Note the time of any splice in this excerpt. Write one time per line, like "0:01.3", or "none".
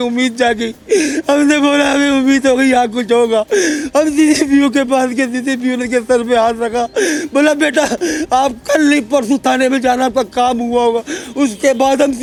none